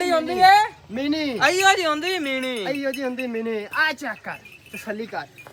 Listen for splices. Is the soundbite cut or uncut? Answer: uncut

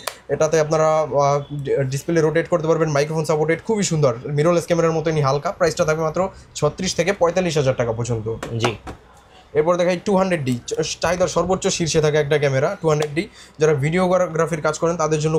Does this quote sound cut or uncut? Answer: uncut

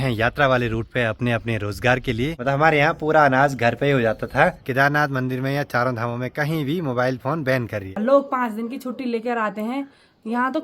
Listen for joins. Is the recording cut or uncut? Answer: cut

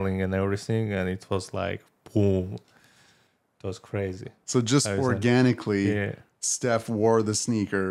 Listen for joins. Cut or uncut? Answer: uncut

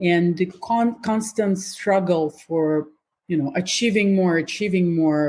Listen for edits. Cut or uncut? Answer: uncut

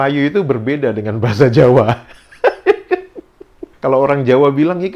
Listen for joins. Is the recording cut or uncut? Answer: cut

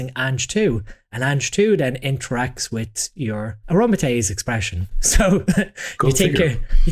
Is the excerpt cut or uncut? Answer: cut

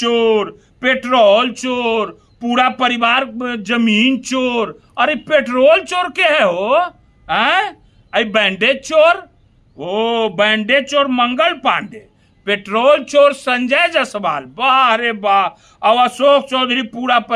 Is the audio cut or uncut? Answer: uncut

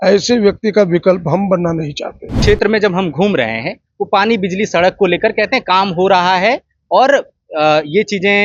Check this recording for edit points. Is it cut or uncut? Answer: cut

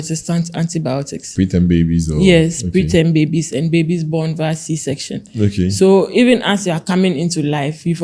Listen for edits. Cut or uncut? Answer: uncut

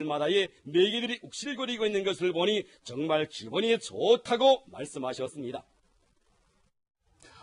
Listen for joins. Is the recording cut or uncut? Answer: uncut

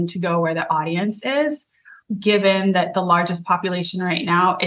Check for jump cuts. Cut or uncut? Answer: cut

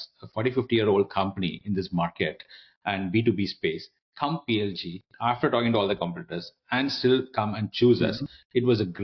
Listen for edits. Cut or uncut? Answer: uncut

